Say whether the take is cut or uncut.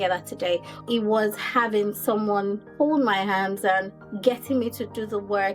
cut